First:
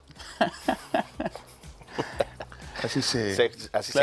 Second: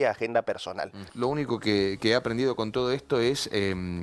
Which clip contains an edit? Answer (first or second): second